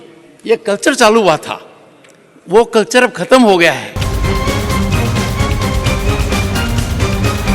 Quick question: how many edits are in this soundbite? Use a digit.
1